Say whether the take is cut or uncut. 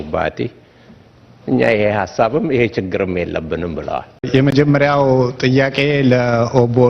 cut